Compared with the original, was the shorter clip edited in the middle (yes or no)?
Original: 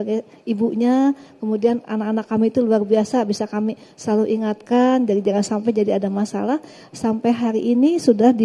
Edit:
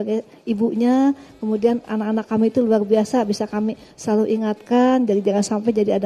no